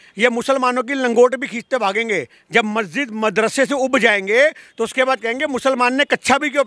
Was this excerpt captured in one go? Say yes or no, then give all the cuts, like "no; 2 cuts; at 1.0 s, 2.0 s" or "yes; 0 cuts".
yes; 0 cuts